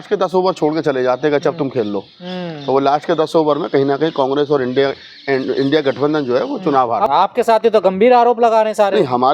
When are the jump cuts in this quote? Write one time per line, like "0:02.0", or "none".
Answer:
0:07.1